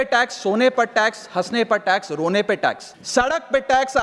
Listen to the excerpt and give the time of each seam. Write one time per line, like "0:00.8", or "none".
0:02.9